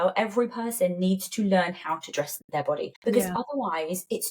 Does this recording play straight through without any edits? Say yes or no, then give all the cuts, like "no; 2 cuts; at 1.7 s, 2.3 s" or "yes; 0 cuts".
no; 1 cut; at 2.7 s